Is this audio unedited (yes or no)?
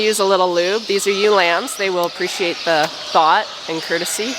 yes